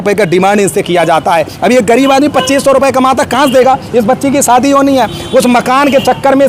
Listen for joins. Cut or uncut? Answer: uncut